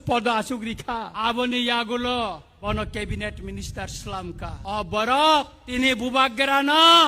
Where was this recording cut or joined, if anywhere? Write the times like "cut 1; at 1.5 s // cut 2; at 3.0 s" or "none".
cut 1; at 1.1 s // cut 2; at 2.5 s // cut 3; at 4.6 s // cut 4; at 5.6 s